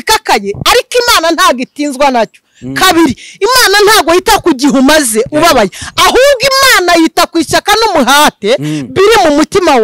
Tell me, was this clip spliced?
no; 0 cuts

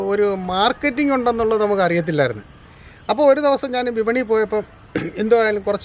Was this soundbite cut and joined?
no; 0 cuts

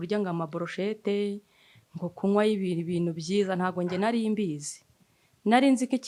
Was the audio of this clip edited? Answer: no; 0 cuts

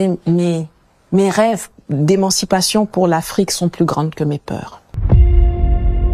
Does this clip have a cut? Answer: yes; 1 cut; at 5.0 s

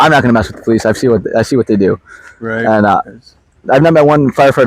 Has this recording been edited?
no; 0 cuts

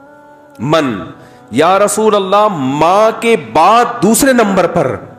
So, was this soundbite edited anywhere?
no; 0 cuts

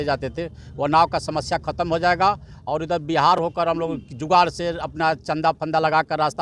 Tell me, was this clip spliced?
no; 0 cuts

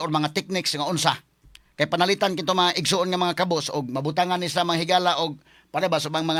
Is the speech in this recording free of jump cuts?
yes; 0 cuts

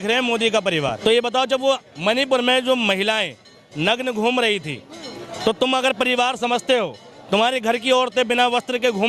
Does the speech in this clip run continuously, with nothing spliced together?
no; 1 cut; at 1.0 s

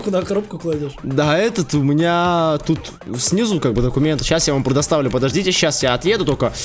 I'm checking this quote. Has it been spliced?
no; 0 cuts

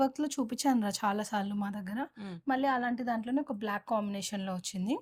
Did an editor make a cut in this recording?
no; 0 cuts

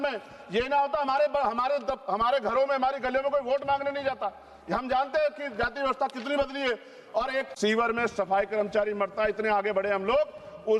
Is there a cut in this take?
yes; 1 cut; at 7.5 s

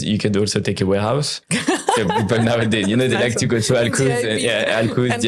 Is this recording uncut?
yes; 0 cuts

